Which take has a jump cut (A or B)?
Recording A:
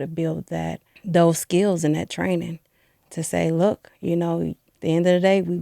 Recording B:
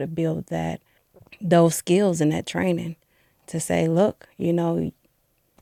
A